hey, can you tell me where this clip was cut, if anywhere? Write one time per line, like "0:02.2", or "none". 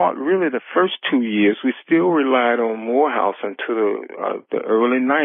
none